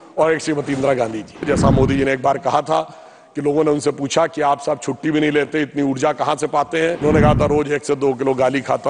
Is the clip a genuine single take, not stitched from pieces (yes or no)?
no